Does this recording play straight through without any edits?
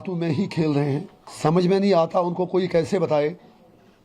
no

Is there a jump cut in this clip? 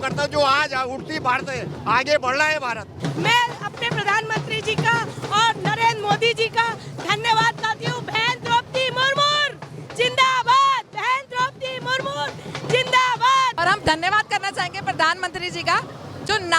yes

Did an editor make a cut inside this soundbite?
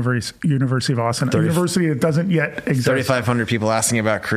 no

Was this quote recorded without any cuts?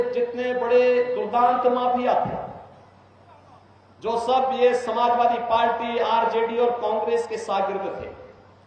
yes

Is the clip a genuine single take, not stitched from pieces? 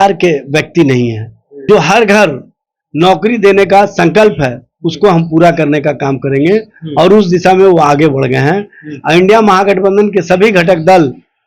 no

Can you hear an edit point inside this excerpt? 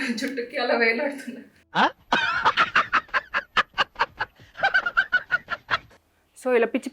yes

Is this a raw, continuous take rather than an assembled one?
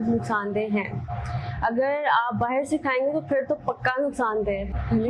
yes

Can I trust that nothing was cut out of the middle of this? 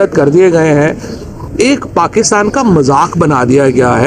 no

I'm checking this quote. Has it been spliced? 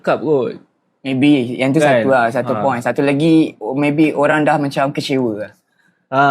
yes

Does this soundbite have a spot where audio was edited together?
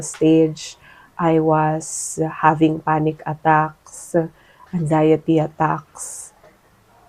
no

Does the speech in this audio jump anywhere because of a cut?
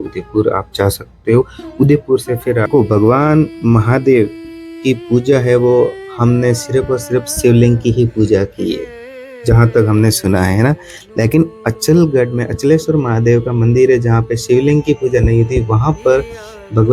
yes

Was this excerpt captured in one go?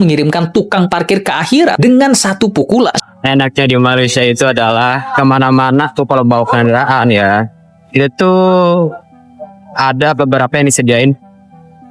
no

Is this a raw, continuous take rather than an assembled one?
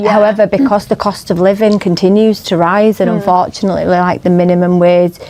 yes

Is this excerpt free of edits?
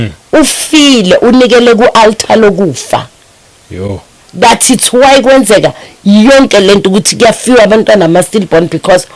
yes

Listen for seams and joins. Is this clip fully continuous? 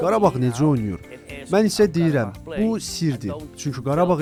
yes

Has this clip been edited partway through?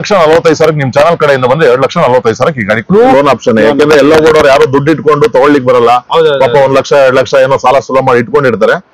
yes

